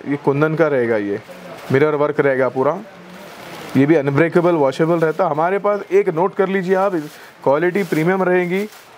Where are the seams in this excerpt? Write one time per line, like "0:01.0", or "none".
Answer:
none